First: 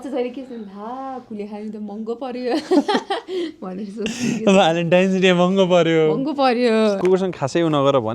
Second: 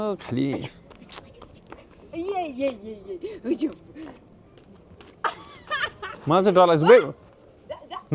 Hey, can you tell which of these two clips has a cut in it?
first; 1 cut; at 7.0 s

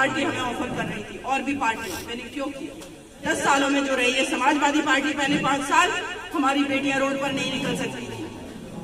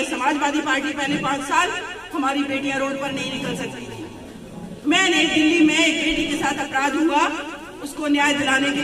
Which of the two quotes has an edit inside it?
first; 1 cut; at 3.3 s

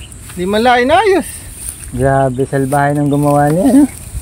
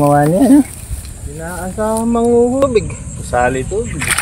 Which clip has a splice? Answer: second; 1 cut; at 2.6 s

